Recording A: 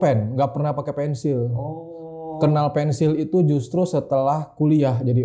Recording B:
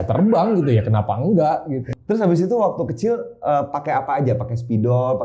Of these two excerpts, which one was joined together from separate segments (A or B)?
B